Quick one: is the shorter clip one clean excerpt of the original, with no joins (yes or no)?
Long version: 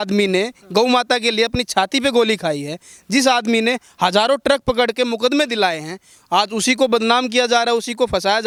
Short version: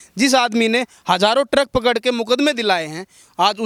yes